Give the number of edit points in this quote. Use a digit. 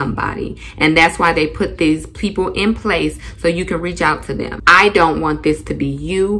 1